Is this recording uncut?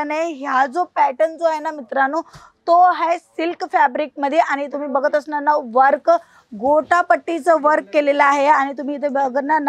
yes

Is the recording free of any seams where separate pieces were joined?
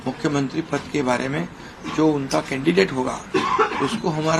yes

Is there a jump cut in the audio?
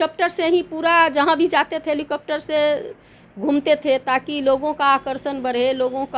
no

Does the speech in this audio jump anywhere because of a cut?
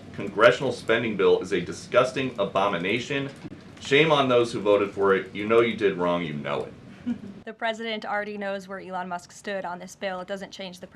yes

